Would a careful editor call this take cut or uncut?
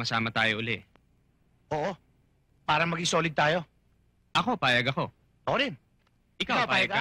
uncut